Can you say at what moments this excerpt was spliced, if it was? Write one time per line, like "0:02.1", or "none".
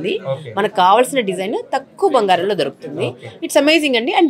none